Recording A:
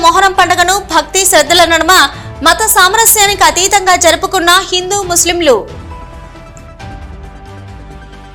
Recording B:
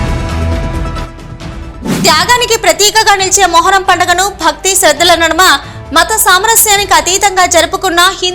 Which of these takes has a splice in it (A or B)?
B